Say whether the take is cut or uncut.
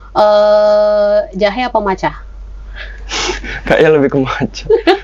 uncut